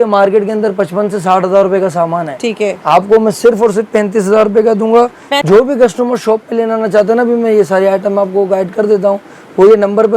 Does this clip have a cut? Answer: yes; 1 cut; at 5.3 s

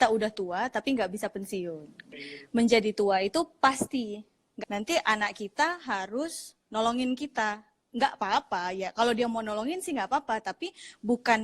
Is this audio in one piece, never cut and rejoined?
no; 2 cuts; at 2.3 s, 4.4 s

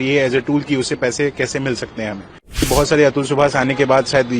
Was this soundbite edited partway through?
yes; 1 cut; at 2.7 s

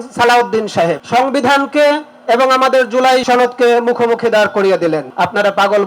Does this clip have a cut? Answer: yes; 3 cuts; at 1.0 s, 3.2 s, 5.1 s

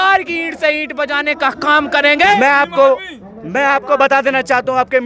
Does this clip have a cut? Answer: yes; 1 cut; at 2.4 s

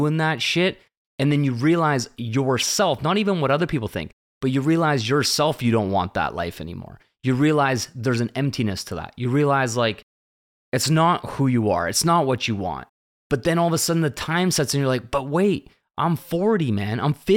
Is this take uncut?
yes; 0 cuts

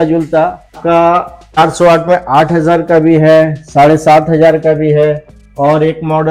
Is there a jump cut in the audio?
yes; 2 cuts; at 0.8 s, 1.6 s

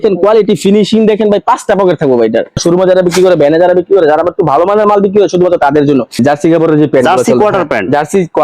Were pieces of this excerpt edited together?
yes; 2 cuts; at 2.6 s, 6.2 s

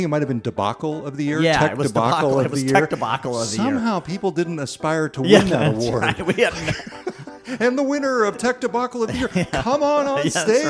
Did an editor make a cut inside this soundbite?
no; 0 cuts

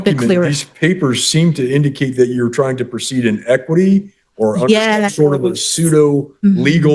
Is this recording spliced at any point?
no; 0 cuts

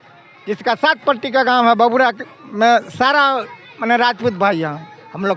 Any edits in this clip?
no; 0 cuts

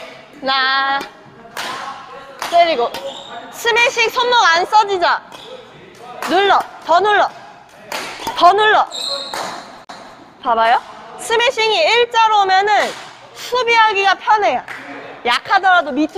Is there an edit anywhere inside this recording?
no; 0 cuts

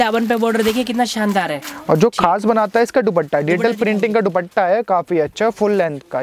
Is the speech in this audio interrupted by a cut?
no; 0 cuts

